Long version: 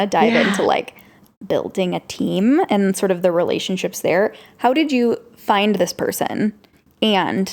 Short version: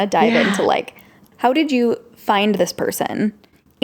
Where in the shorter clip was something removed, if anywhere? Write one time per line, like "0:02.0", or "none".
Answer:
0:01.2